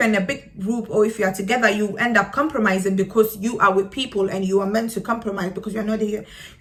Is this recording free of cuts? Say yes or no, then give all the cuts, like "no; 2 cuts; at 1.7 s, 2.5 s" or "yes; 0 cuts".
yes; 0 cuts